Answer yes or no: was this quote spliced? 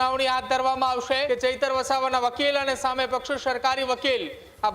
yes